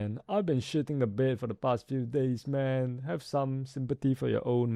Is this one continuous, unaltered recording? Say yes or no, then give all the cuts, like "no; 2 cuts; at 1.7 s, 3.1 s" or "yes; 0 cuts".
yes; 0 cuts